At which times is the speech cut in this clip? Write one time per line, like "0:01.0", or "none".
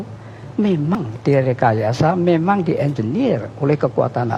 0:00.9